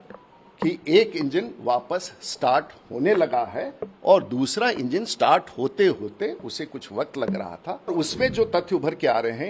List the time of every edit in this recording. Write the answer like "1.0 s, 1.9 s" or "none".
7.9 s